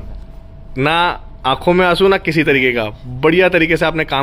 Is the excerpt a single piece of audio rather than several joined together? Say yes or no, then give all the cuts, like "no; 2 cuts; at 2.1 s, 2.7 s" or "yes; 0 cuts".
yes; 0 cuts